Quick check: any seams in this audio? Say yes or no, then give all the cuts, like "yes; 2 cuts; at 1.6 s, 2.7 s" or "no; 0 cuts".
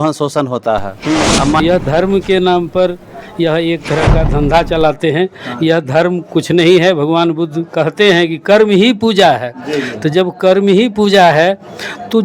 yes; 1 cut; at 1.6 s